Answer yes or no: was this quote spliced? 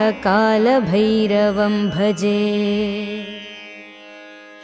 yes